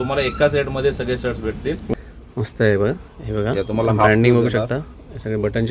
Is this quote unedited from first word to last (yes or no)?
no